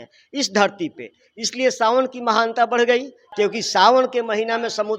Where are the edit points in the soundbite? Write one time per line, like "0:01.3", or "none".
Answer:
0:03.2